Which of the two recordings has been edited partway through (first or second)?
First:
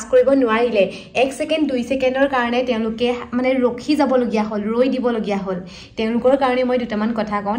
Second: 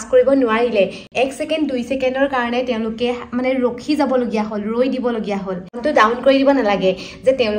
second